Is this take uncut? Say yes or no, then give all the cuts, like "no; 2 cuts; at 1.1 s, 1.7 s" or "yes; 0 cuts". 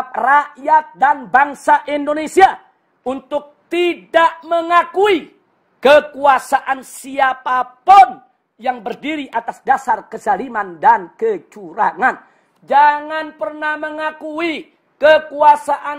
yes; 0 cuts